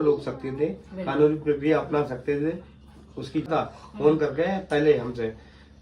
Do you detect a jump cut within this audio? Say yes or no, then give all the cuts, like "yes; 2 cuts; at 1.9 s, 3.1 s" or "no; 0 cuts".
yes; 1 cut; at 3.5 s